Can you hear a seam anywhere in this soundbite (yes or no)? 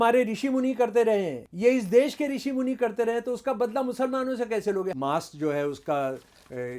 yes